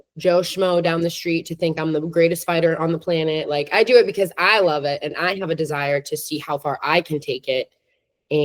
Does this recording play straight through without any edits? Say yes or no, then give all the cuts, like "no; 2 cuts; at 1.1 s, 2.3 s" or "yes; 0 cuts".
yes; 0 cuts